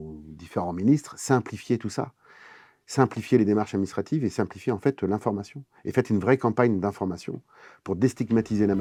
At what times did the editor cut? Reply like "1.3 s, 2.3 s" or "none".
none